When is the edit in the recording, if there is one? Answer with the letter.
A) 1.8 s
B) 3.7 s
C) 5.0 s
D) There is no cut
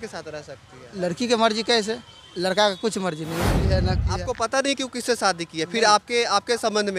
B